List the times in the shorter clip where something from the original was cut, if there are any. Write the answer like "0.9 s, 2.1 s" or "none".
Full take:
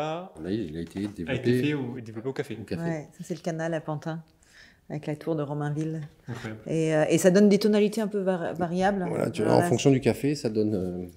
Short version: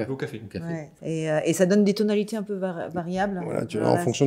0.9 s